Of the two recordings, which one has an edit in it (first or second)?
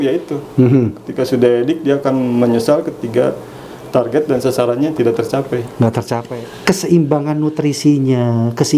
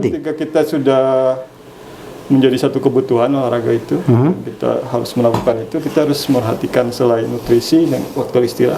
first